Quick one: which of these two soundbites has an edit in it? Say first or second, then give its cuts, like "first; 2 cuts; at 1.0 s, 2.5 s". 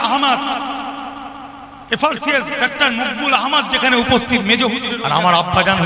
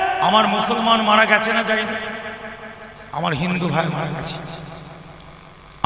first; 1 cut; at 4.9 s